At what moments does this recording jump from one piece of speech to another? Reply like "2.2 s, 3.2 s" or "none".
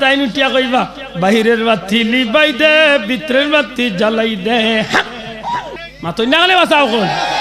5.8 s